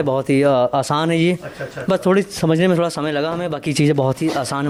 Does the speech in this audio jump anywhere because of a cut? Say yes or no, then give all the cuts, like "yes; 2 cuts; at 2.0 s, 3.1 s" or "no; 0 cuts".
no; 0 cuts